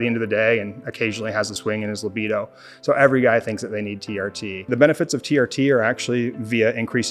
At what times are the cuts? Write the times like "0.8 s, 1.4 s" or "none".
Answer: 1.5 s, 4.7 s